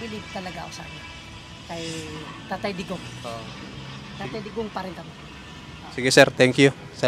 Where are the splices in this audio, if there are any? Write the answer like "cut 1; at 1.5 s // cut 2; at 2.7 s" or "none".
none